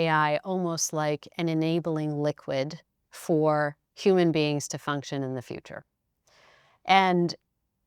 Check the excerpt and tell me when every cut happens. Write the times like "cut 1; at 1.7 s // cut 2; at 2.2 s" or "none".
cut 1; at 3.8 s